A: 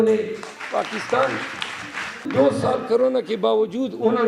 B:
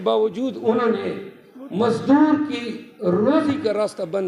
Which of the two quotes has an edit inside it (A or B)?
A